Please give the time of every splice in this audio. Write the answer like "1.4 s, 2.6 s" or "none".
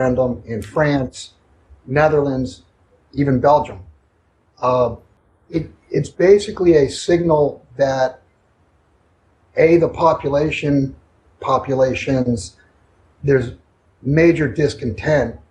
11.3 s